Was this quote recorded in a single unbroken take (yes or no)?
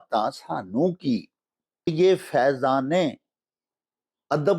no